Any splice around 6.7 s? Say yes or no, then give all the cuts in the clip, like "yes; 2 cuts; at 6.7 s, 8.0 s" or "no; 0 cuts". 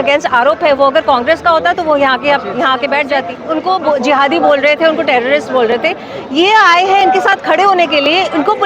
no; 1 cut; at 3.4 s